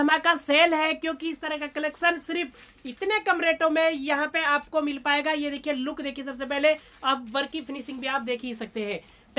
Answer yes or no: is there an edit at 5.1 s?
no